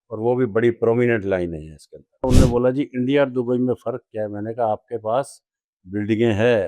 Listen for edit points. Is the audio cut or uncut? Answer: cut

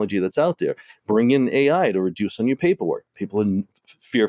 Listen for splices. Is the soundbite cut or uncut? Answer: uncut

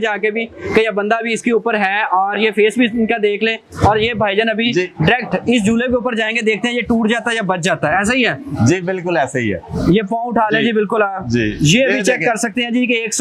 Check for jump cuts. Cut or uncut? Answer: uncut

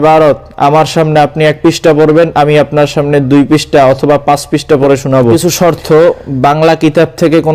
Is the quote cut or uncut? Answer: cut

